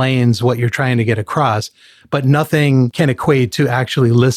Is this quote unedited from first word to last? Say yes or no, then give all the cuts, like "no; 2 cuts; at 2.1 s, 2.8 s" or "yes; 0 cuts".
no; 1 cut; at 2.9 s